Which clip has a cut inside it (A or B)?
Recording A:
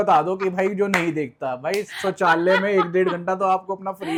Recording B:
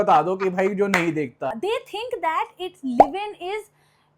B